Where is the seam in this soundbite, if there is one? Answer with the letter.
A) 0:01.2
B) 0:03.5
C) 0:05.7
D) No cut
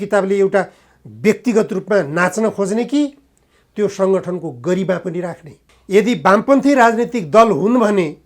C